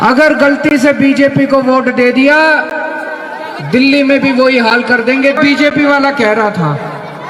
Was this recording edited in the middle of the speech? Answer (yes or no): yes